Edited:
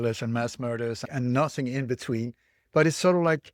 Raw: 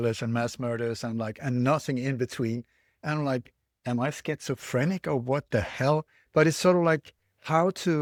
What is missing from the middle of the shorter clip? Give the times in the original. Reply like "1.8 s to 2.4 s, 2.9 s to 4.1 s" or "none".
1.0 s to 1.3 s, 2.9 s to 6.2 s